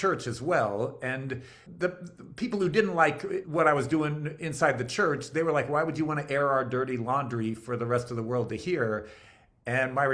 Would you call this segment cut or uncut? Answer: cut